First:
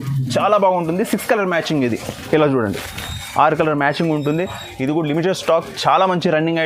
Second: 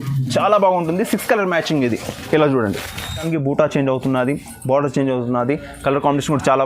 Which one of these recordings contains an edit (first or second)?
second